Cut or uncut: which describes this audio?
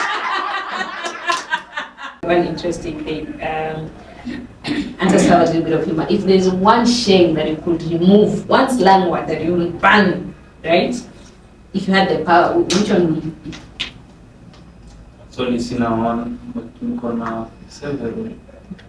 cut